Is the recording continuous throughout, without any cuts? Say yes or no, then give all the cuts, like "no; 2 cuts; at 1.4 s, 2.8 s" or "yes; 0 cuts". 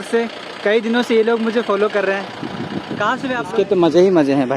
no; 1 cut; at 3.6 s